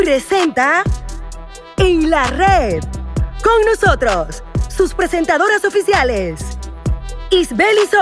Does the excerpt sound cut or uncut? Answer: uncut